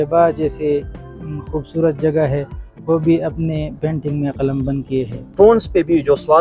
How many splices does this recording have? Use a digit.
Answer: 1